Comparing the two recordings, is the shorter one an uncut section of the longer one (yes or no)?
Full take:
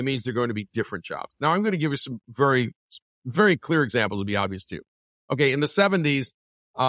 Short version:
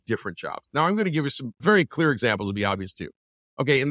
no